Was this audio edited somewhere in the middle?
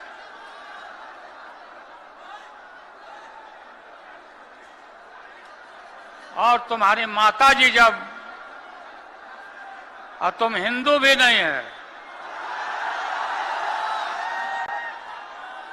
no; 0 cuts

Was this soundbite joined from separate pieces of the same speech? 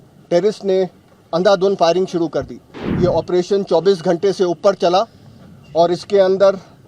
yes; 1 cut; at 2.8 s

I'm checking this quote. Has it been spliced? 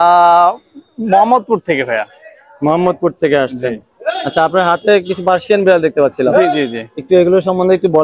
no; 0 cuts

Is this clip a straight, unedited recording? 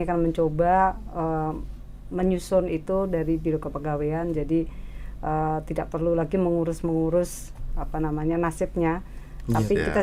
yes; 0 cuts

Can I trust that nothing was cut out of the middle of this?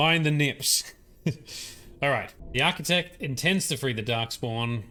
yes; 0 cuts

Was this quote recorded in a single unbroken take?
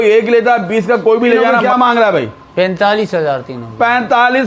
no; 1 cut; at 1.6 s

